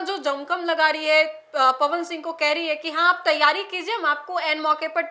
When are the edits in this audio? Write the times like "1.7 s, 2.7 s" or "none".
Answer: none